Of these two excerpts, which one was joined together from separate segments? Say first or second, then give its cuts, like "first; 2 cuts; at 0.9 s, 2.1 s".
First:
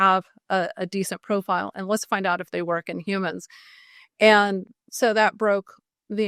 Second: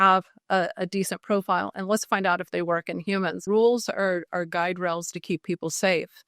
second; 1 cut; at 3.4 s